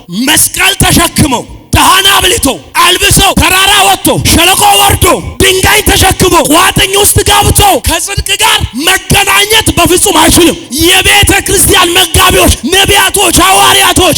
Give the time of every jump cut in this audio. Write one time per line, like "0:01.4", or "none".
0:03.3
0:07.8
0:10.7